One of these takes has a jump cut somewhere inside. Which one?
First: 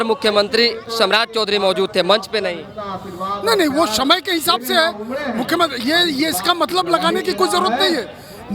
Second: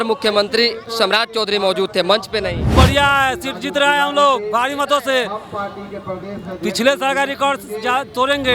second; 1 cut; at 2.7 s

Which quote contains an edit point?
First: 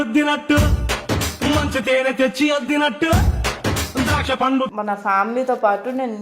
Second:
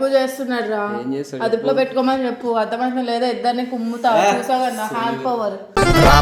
first; 1 cut; at 4.7 s

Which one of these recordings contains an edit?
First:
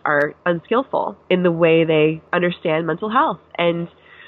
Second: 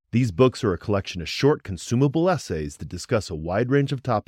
first; 2 cuts; at 1.2 s, 2.2 s

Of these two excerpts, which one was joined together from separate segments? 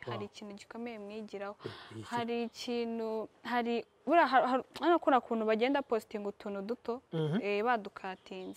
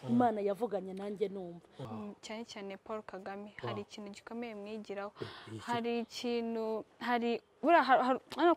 second; 1 cut; at 1.8 s

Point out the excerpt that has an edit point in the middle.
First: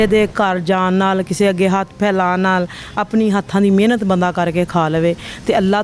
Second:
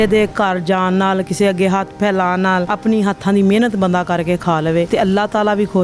second; 2 cuts; at 2.7 s, 4.9 s

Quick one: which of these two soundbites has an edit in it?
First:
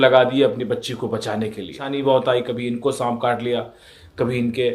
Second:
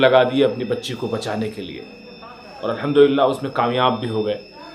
first; 1 cut; at 1.8 s

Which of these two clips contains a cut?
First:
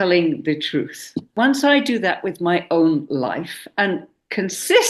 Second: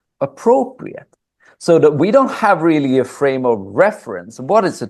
first; 1 cut; at 1.3 s

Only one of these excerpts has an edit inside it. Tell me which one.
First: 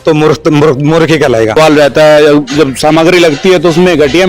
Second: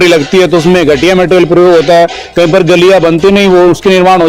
first; 1 cut; at 1.6 s

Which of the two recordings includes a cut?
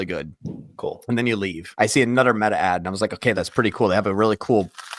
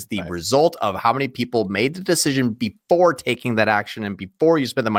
first; 2 cuts; at 1.6 s, 3.3 s

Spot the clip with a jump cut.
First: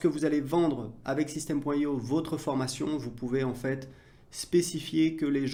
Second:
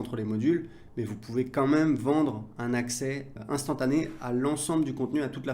second; 1 cut; at 3.4 s

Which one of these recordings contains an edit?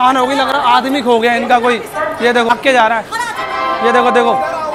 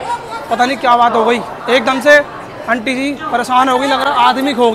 first; 1 cut; at 2.5 s

